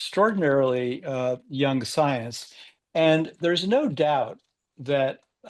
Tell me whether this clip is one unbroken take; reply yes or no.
yes